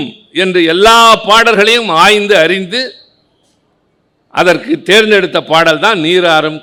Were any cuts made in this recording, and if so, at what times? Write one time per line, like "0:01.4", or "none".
none

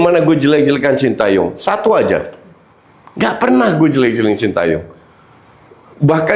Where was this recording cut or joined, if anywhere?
none

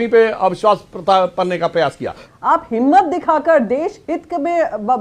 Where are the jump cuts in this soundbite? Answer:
0:02.2

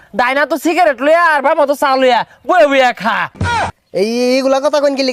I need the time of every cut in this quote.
0:03.6

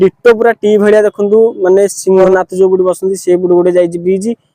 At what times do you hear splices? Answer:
0:02.2

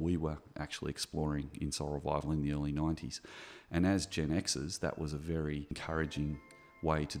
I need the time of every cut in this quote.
0:05.8

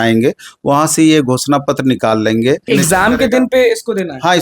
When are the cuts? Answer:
0:02.7

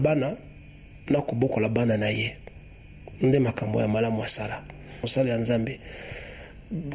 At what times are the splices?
0:05.1

